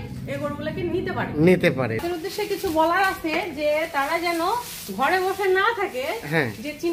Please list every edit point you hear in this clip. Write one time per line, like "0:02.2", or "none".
0:02.0